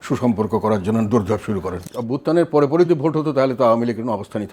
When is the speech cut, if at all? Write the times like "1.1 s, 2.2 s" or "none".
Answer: 1.8 s, 2.9 s